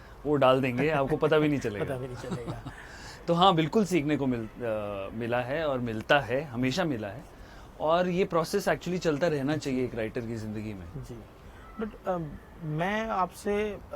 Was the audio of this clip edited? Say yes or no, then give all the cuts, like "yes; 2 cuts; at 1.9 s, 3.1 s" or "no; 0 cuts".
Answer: no; 0 cuts